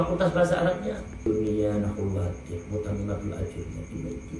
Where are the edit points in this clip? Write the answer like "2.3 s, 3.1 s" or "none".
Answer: 1.2 s

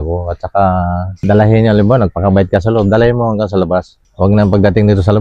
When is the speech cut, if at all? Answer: none

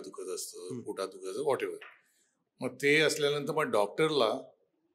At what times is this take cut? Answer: none

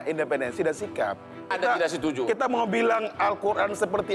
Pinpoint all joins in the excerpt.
1.5 s

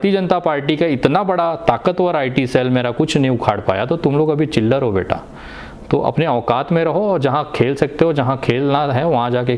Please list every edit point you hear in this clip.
none

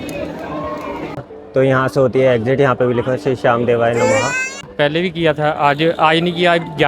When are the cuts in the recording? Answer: 1.2 s, 4.7 s

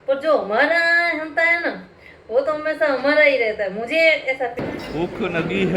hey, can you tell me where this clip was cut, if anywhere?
4.6 s

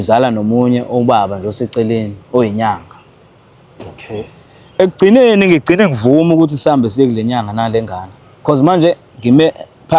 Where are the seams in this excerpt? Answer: 3.6 s

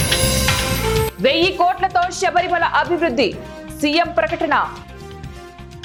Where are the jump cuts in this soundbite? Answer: none

